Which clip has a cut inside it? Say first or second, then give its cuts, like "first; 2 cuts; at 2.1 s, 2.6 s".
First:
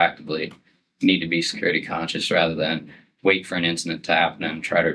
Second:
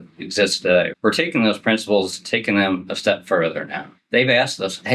second; 2 cuts; at 0.9 s, 3.8 s